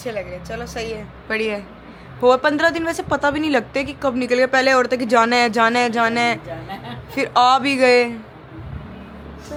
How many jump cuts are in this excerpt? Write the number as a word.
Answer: zero